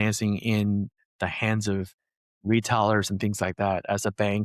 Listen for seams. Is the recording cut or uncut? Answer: uncut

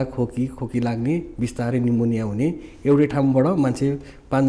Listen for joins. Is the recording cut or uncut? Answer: uncut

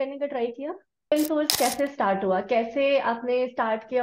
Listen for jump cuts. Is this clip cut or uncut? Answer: cut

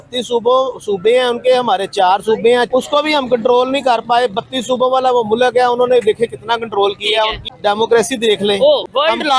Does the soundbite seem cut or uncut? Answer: uncut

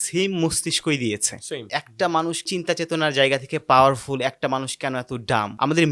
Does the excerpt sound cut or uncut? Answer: uncut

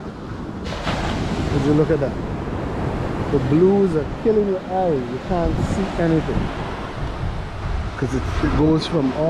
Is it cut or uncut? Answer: uncut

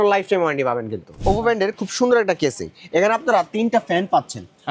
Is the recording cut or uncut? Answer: cut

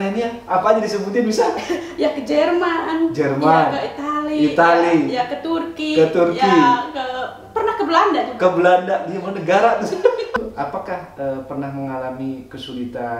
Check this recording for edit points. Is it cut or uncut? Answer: cut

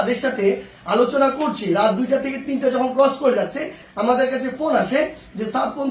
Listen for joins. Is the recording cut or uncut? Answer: cut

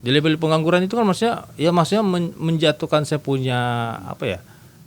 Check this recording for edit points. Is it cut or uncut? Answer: uncut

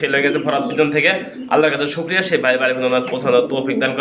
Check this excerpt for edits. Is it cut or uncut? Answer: uncut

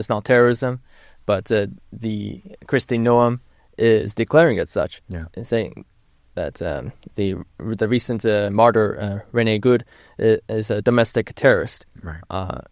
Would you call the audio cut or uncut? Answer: uncut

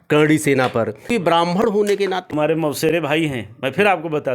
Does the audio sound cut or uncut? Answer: cut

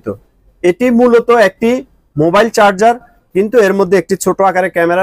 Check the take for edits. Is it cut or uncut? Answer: uncut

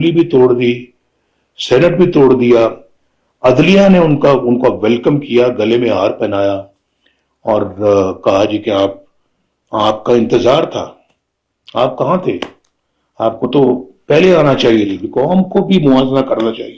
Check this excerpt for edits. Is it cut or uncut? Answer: cut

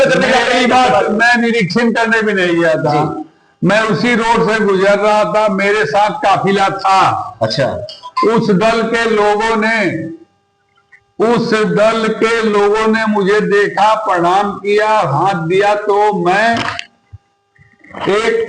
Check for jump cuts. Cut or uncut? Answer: uncut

